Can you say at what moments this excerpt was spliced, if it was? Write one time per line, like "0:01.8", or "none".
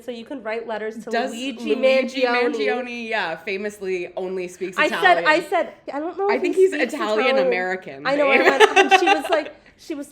0:05.8